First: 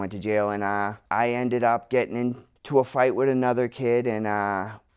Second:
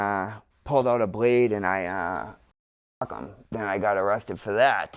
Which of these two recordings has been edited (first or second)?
first